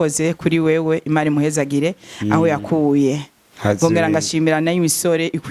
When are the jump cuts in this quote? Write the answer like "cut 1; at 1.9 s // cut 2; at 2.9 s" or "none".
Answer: none